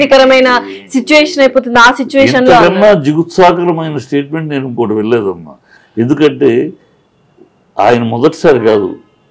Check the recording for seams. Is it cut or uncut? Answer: uncut